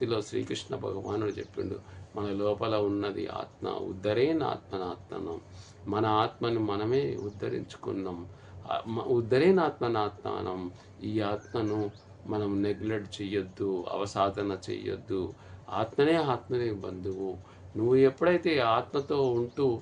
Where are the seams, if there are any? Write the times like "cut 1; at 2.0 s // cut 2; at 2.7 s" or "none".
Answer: none